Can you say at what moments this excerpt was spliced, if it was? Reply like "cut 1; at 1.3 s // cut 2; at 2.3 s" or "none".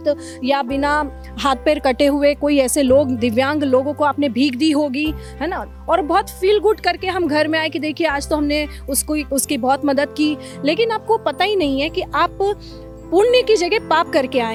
none